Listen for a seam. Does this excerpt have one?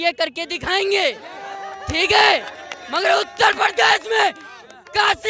no; 0 cuts

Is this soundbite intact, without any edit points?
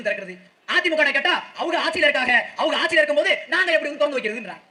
yes; 0 cuts

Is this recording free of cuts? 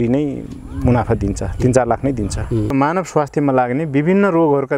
no; 1 cut; at 2.7 s

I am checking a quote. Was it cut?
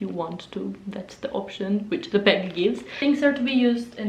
yes; 1 cut; at 2.9 s

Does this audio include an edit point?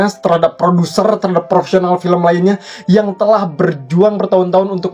no; 0 cuts

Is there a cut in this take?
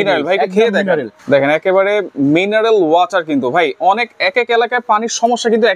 no; 0 cuts

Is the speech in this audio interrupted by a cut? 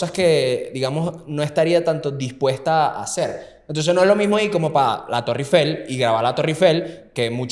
no; 0 cuts

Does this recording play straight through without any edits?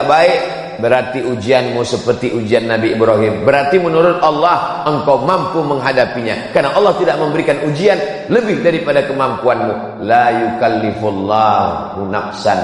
yes; 0 cuts

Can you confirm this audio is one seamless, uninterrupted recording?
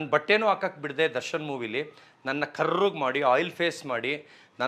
yes; 0 cuts

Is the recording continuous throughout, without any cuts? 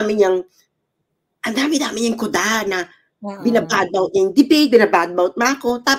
yes; 0 cuts

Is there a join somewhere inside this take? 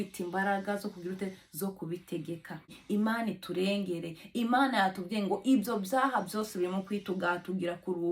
yes; 1 cut; at 2.8 s

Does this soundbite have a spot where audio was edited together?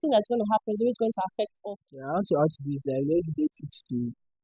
yes; 1 cut; at 1.6 s

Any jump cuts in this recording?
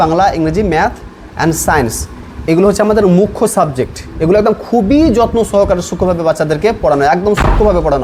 no; 0 cuts

